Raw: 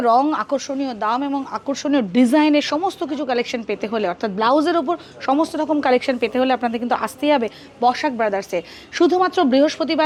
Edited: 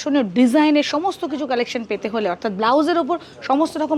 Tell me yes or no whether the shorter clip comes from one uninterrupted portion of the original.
yes